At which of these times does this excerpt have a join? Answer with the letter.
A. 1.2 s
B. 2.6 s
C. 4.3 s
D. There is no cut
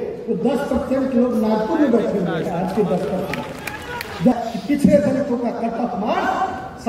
C